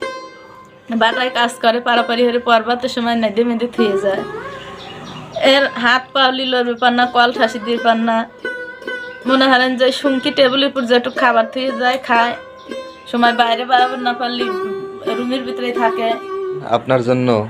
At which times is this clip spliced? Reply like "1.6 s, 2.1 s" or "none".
16.6 s